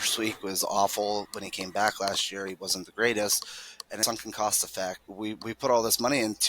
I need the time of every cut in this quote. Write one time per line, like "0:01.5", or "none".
0:04.0
0:05.1